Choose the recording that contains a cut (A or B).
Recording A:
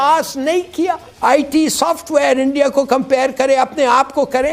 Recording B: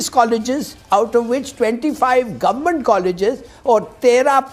A